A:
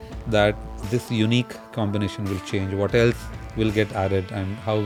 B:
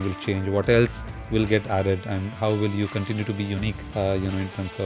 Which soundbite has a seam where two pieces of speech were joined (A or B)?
B